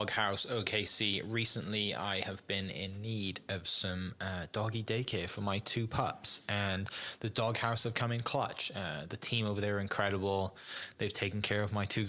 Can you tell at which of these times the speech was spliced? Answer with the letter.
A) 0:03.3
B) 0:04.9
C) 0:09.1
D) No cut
D